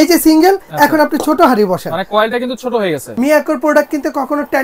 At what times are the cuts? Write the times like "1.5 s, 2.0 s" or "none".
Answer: 3.1 s